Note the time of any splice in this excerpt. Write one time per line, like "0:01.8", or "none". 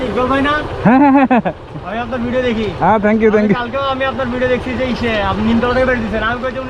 none

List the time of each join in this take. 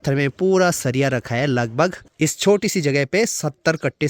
0:02.0

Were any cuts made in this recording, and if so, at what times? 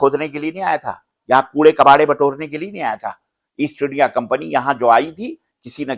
none

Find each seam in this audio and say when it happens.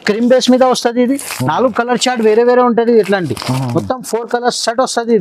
none

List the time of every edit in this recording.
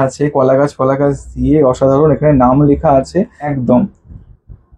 0:03.4

